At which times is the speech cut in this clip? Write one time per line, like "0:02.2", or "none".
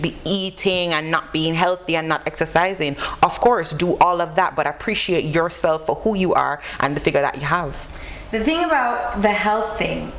none